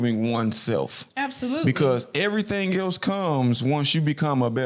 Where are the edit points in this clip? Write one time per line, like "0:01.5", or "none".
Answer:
none